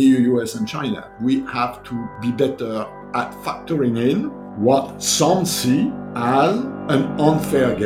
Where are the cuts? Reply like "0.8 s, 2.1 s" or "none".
1.1 s, 2.1 s, 3.4 s, 4.4 s, 6.1 s, 6.8 s